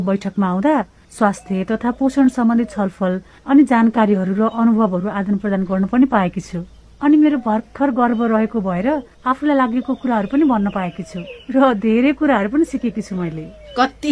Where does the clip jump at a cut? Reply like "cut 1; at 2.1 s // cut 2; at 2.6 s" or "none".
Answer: cut 1; at 1.0 s